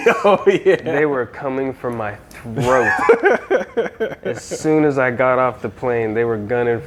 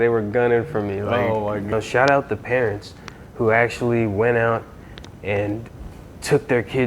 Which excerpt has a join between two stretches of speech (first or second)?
second